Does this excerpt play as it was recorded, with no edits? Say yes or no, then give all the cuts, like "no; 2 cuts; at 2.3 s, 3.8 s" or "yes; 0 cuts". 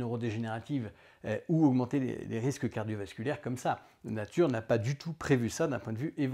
yes; 0 cuts